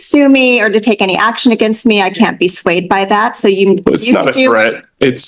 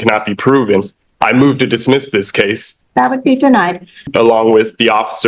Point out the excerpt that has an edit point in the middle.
second; 2 cuts; at 2.7 s, 4.1 s

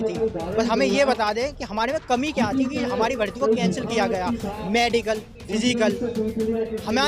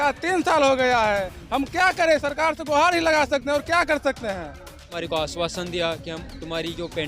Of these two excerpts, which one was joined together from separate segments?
second; 1 cut; at 4.9 s

